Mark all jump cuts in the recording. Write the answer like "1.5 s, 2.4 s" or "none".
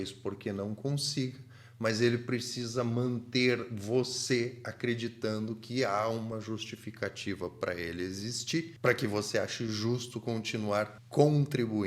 none